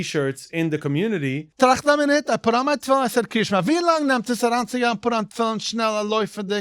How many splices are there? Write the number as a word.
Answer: one